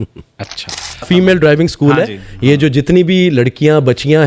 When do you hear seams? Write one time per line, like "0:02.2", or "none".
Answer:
0:01.0